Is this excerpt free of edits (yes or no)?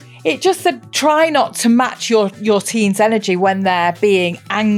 yes